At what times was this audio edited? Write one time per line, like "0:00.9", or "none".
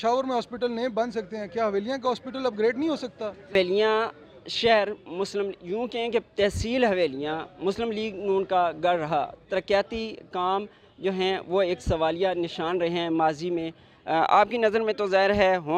0:03.5